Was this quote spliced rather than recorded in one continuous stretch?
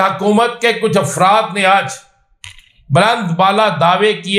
no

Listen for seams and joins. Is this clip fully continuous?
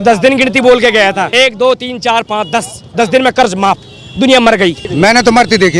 no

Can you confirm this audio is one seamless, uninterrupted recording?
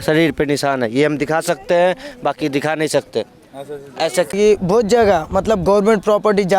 no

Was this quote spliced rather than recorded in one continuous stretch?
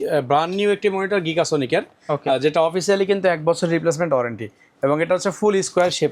no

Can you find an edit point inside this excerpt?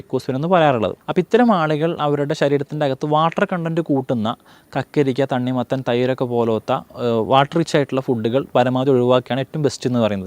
yes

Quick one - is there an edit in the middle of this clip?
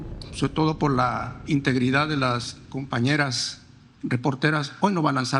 no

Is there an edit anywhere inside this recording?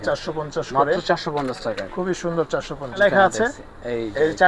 yes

